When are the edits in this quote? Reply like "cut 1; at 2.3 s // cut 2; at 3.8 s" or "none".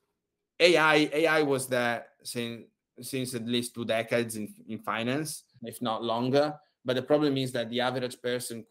cut 1; at 5.5 s